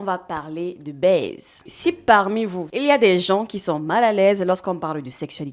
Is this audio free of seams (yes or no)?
no